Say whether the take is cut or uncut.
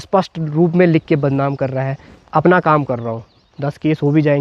cut